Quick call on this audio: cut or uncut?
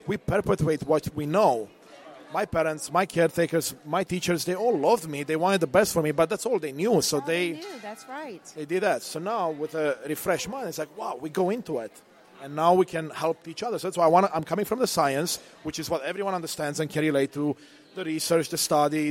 uncut